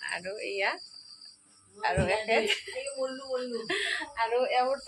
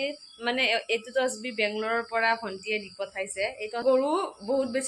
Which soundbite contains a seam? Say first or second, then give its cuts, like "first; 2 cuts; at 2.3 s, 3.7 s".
second; 1 cut; at 3.8 s